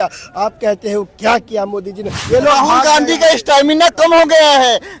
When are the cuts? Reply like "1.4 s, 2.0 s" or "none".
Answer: 2.2 s